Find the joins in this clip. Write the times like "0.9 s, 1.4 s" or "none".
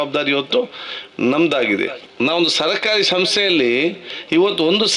2.0 s